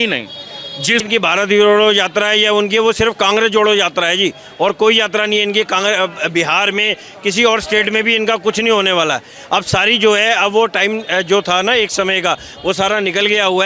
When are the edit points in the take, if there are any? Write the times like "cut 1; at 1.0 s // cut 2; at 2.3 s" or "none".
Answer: cut 1; at 1.1 s